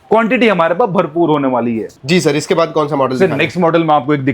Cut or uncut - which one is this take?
uncut